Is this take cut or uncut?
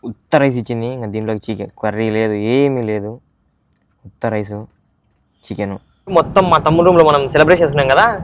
cut